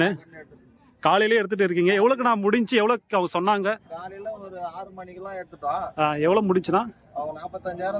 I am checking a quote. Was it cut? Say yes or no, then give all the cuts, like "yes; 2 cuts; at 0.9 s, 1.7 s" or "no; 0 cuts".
no; 0 cuts